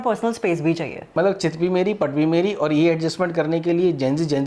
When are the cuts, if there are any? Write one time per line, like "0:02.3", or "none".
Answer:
0:01.0